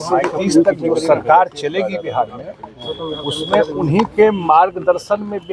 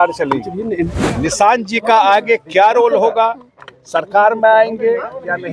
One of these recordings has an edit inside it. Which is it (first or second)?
second